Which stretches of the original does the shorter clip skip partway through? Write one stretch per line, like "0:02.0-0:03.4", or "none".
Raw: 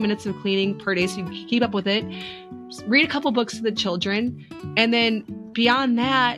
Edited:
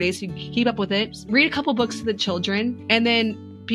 0:02.1-0:02.7
0:04.4-0:04.7